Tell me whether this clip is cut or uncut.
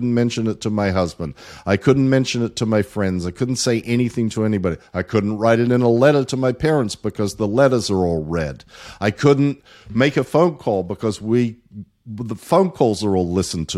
uncut